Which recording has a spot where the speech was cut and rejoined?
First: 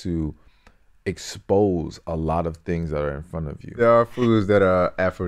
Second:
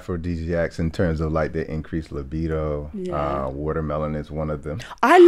first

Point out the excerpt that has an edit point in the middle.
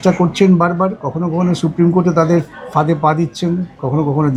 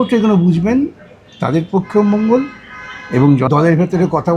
second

